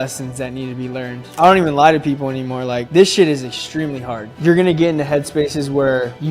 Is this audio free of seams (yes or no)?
no